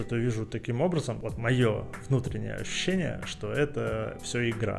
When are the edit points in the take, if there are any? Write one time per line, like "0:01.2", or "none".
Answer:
0:01.2
0:01.9